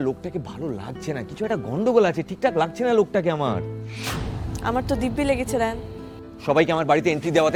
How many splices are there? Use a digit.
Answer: 0